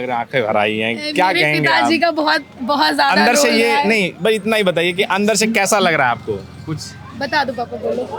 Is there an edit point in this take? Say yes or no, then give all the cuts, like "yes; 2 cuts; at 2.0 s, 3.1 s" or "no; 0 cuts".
no; 0 cuts